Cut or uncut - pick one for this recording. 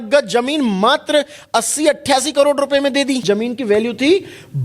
cut